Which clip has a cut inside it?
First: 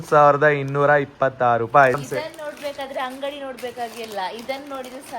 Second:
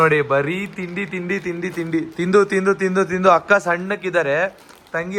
first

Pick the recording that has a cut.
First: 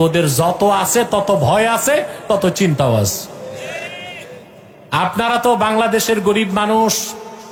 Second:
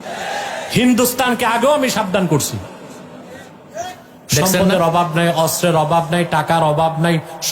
second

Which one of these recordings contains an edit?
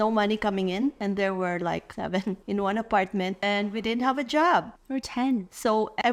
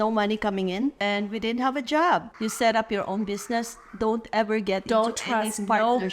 second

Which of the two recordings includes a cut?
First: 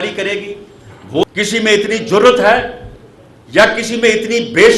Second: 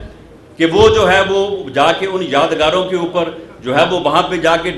first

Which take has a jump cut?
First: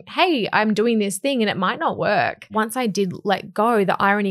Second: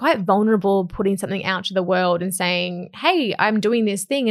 first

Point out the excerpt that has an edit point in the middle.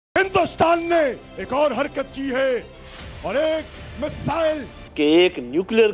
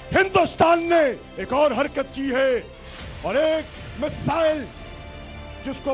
first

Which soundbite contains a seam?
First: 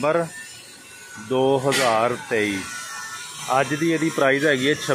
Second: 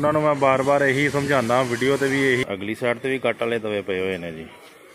second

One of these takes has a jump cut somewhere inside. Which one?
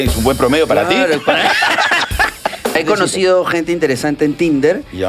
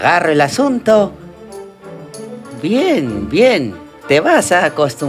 first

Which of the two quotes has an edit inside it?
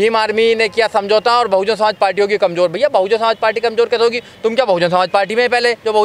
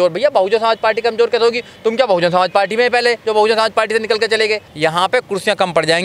second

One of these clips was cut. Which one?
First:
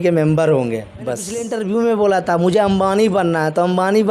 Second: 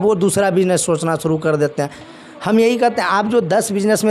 first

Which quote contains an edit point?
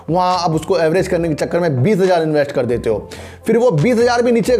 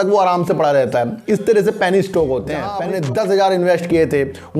second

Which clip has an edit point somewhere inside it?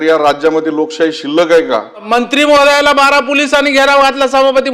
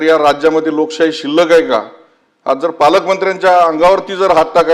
first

